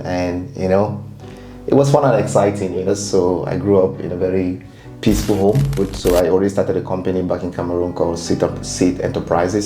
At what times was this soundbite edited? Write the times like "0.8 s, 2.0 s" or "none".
2.9 s, 5.8 s